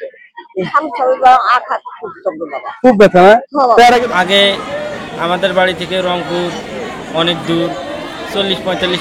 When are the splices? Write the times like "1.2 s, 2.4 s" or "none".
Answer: 4.0 s